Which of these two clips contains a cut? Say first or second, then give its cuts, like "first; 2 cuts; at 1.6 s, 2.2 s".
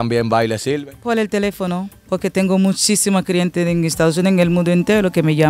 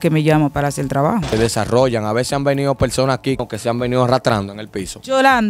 second; 2 cuts; at 1.3 s, 3.4 s